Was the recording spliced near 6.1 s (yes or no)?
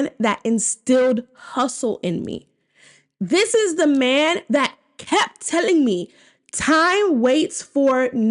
no